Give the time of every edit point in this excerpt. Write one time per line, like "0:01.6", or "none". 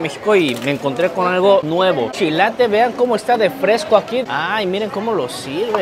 0:02.1
0:04.2